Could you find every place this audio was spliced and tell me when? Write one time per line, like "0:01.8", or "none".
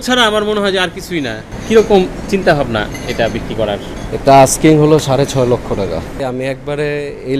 0:01.5
0:06.1